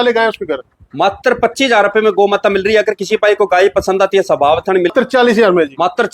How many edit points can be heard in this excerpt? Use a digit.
1